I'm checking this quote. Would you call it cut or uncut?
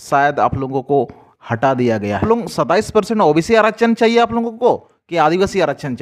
cut